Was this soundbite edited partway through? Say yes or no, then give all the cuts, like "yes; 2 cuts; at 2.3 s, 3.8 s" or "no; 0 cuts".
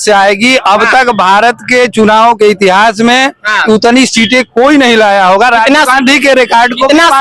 no; 0 cuts